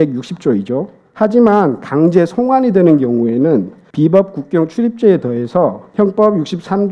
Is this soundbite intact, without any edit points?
no; 3 cuts; at 1.0 s, 3.8 s, 5.8 s

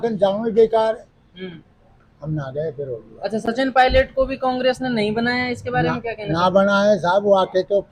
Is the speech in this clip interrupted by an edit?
no; 0 cuts

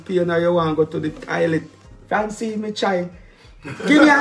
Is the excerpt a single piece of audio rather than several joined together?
no; 1 cut; at 1.7 s

